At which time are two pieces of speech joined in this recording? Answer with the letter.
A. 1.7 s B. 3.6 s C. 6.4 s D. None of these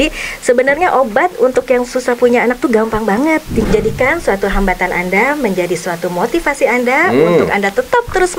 B